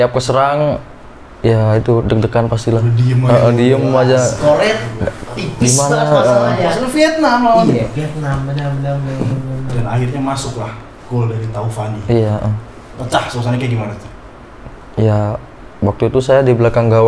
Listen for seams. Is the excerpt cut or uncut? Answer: uncut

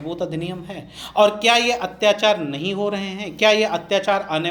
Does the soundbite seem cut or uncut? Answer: uncut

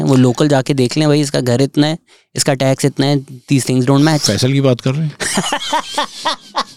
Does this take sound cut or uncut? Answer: uncut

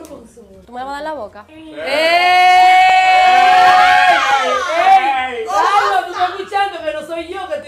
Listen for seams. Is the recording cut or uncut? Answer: uncut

